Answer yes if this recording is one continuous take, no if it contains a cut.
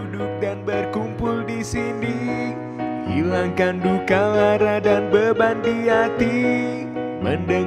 yes